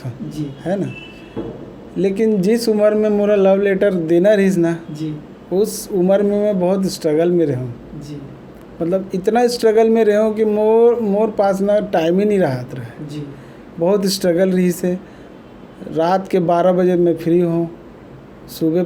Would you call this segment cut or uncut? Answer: uncut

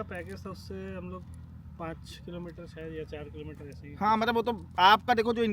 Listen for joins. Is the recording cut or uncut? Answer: uncut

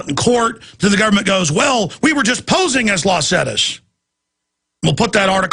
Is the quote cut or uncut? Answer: cut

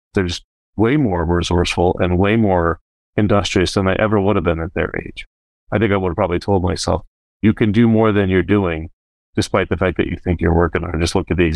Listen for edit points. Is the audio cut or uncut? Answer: uncut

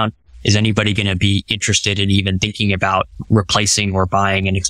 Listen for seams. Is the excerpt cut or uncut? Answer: cut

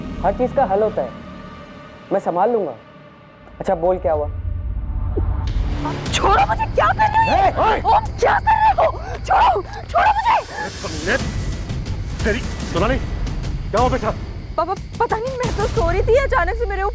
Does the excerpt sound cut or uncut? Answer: cut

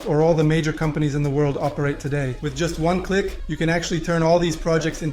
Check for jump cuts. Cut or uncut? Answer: cut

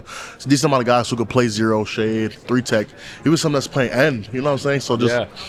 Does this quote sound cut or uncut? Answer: uncut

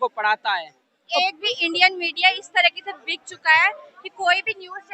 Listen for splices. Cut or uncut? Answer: cut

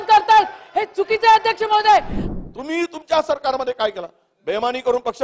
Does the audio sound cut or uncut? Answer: cut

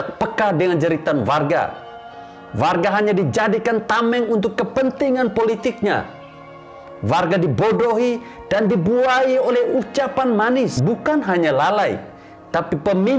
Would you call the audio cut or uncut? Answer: cut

